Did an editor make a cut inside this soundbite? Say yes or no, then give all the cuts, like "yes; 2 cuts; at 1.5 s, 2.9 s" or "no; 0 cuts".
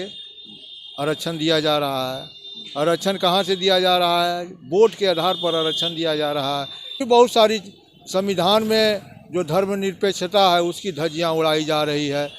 yes; 1 cut; at 7.0 s